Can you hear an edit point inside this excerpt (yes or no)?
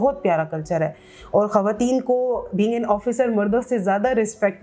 no